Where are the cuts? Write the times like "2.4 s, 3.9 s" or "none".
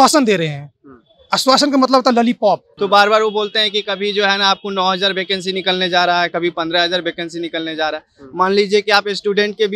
2.7 s